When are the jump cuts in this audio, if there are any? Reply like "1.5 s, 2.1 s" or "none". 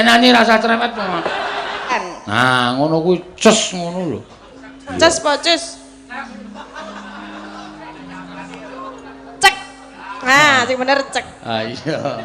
2.0 s